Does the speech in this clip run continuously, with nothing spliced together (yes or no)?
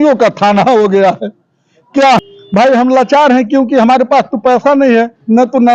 no